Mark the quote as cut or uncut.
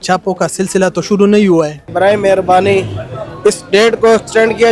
cut